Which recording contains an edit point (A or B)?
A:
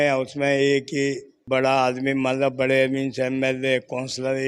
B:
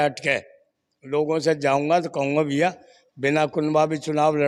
A